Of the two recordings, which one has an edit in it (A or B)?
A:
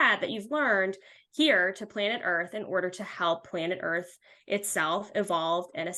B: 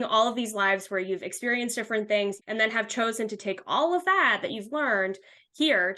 B